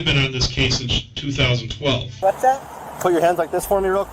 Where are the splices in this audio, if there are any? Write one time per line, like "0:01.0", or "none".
0:02.1